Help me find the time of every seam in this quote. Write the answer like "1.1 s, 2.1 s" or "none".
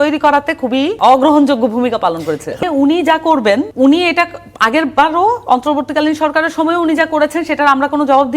1.0 s, 2.6 s, 3.7 s